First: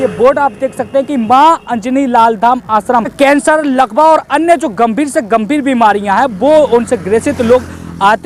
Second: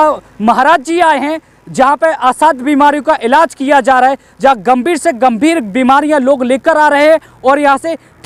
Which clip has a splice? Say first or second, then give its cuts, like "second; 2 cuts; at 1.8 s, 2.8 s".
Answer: first; 1 cut; at 3.1 s